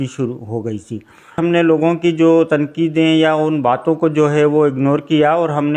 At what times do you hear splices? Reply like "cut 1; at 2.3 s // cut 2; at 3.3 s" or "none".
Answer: cut 1; at 1.4 s